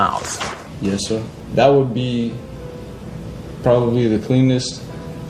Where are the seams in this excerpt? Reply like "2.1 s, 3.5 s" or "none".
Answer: 1.4 s